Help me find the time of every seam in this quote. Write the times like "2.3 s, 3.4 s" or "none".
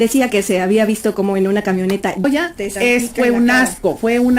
2.2 s